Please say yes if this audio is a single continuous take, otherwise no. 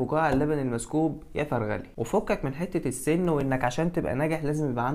no